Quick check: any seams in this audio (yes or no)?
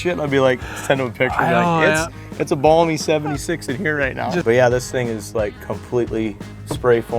yes